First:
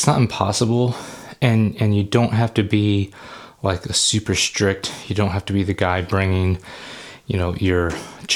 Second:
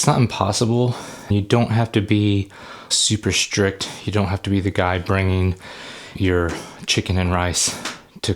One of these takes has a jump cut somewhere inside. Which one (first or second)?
second